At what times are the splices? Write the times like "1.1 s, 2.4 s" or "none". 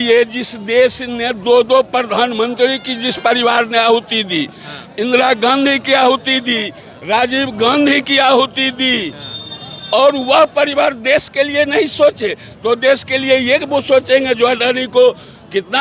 none